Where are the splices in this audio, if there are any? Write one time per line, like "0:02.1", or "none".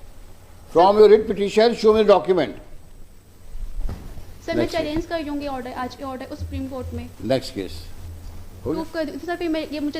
0:03.7
0:08.8

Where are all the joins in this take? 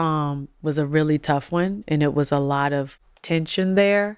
0:02.9

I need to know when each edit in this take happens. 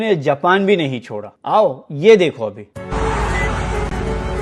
none

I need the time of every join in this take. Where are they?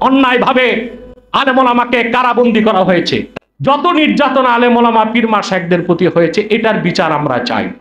0:03.3

